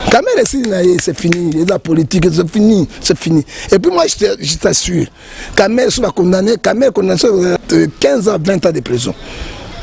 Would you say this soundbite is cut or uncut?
cut